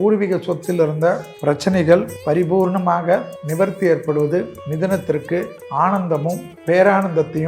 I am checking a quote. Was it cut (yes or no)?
yes